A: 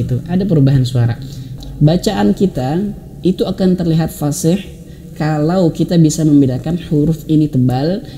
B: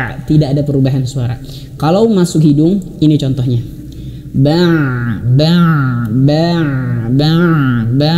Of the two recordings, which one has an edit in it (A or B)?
A